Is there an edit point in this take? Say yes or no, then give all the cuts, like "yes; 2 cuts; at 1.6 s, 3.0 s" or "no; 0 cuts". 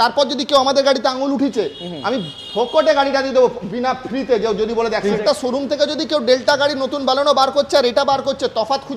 yes; 1 cut; at 5.0 s